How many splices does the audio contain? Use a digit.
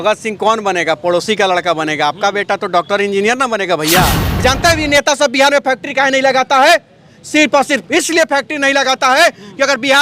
1